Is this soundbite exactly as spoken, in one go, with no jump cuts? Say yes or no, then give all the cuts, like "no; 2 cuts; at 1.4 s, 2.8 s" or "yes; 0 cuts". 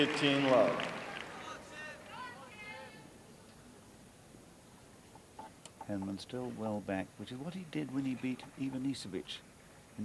no; 1 cut; at 7.6 s